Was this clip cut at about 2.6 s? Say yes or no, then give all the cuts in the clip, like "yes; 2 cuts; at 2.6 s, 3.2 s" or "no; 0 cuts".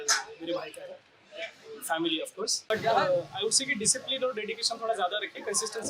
yes; 1 cut; at 2.6 s